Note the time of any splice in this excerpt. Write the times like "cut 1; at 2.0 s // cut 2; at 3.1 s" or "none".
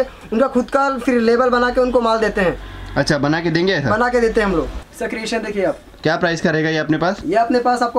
cut 1; at 4.8 s